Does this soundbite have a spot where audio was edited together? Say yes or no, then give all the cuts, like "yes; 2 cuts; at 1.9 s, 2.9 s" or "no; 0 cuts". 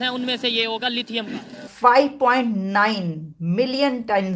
yes; 1 cut; at 1.7 s